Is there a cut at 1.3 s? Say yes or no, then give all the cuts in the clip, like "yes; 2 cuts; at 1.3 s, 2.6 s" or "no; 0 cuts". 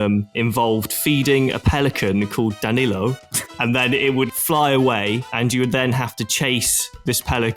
no; 2 cuts; at 3.5 s, 5.3 s